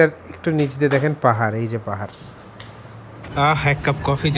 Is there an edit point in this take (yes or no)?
yes